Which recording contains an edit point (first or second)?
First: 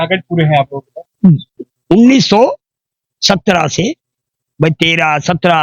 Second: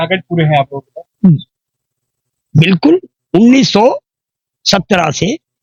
first